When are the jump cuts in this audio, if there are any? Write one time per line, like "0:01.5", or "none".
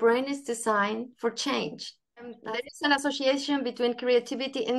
0:02.4

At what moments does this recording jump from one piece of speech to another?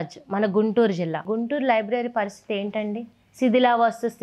0:01.2

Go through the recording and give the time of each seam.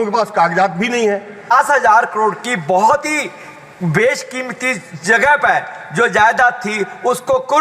0:01.5

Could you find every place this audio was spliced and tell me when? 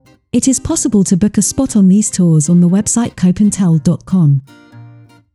0:04.4

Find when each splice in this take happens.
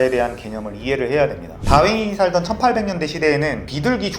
0:01.5

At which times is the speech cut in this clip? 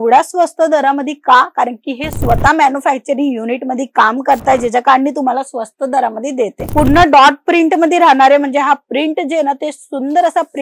0:06.6

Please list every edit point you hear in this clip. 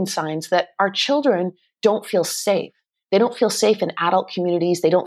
none

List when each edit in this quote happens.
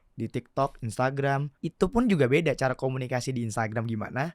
0:01.6

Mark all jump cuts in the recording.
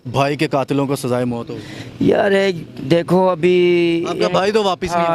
none

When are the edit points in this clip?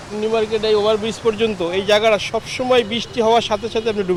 none

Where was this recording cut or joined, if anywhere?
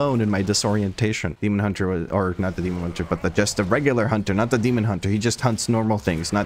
0:01.3

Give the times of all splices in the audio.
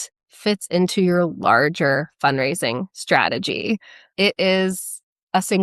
0:04.0

